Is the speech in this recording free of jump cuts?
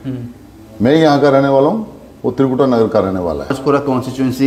no; 1 cut; at 3.6 s

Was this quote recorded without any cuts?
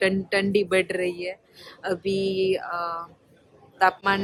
yes; 0 cuts

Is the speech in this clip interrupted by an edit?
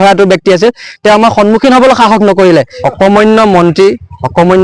yes; 1 cut; at 2.8 s

